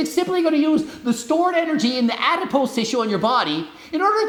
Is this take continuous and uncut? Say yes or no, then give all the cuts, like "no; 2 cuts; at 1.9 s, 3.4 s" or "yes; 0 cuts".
yes; 0 cuts